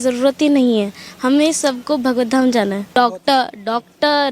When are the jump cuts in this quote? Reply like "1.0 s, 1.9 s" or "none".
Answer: 2.9 s